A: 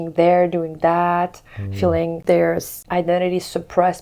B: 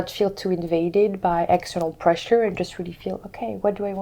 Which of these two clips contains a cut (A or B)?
A